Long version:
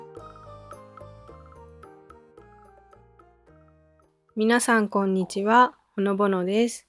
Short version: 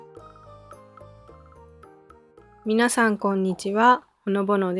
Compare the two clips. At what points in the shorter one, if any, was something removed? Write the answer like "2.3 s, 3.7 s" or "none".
2.6 s

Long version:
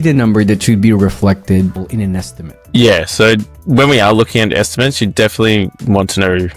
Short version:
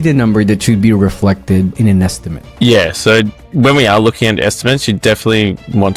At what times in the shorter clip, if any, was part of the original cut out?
1.7 s

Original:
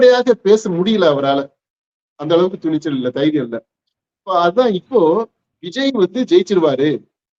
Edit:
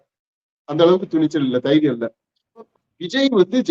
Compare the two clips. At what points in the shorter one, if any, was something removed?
2.7 s

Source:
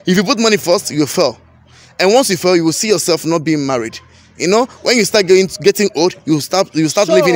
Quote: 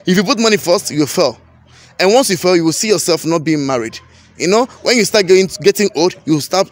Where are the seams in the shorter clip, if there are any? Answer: none

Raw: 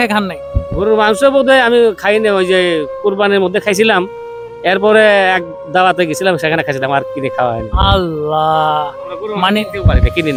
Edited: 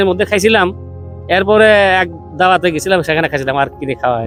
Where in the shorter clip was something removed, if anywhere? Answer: none

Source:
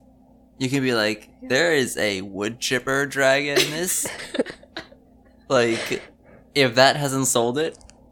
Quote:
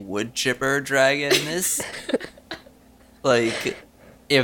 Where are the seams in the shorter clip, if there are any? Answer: none

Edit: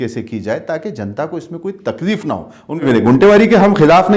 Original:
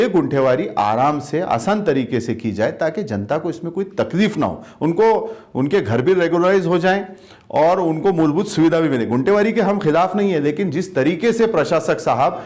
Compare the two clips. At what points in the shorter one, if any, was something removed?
2.8 s

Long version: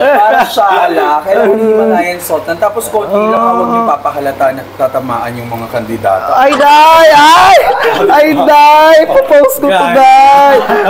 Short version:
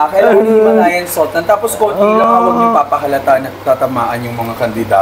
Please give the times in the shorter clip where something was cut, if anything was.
none

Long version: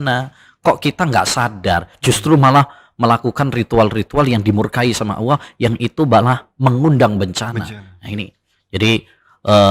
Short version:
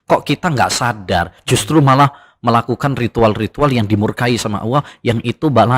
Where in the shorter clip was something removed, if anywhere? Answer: none

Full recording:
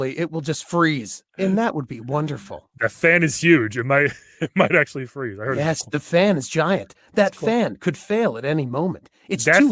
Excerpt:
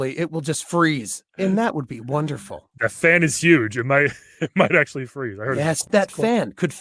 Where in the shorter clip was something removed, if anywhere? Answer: 5.8 s

